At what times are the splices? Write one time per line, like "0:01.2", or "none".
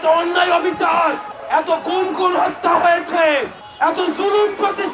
0:01.3
0:03.6